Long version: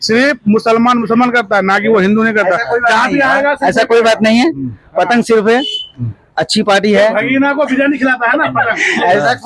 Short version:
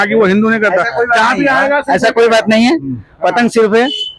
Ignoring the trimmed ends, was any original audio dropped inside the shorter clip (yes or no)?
no